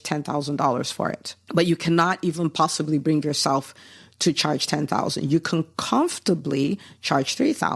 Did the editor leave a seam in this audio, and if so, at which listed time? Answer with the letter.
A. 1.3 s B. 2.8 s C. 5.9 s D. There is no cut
A